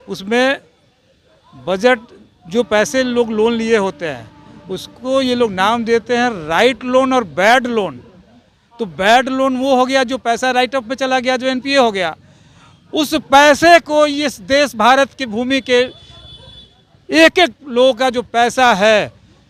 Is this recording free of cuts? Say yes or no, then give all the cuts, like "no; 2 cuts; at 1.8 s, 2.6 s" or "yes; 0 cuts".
yes; 0 cuts